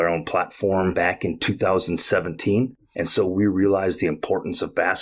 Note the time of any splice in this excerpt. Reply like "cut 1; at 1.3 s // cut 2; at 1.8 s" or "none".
cut 1; at 0.9 s // cut 2; at 2.8 s

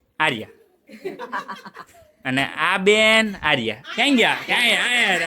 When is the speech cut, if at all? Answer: none

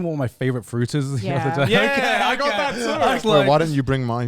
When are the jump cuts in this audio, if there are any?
cut 1; at 3.2 s

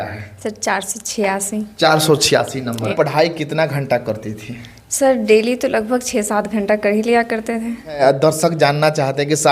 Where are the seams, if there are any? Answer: cut 1; at 2.9 s // cut 2; at 8.0 s

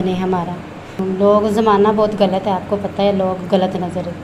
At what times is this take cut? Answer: cut 1; at 1.0 s

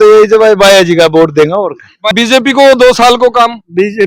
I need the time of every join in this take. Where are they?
cut 1; at 2.1 s

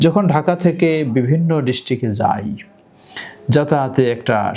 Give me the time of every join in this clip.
none

